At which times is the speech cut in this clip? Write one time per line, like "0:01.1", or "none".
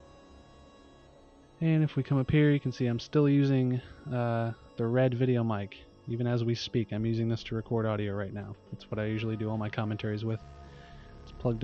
0:03.6